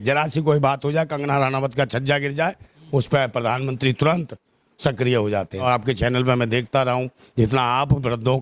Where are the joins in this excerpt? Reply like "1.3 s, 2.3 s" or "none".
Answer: 5.6 s

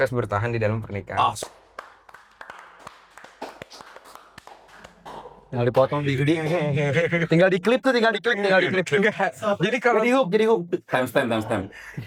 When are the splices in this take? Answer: none

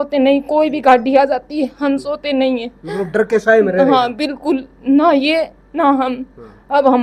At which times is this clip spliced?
none

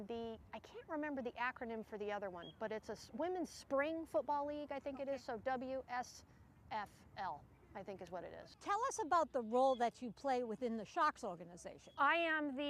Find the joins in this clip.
3.1 s

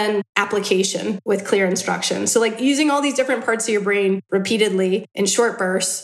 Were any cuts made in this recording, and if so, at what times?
5.1 s

